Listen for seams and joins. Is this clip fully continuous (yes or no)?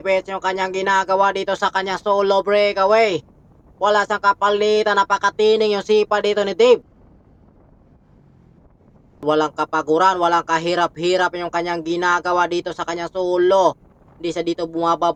yes